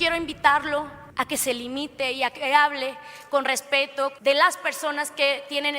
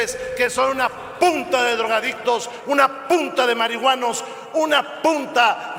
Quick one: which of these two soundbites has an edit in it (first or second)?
first